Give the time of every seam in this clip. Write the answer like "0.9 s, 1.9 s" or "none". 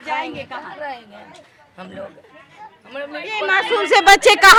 none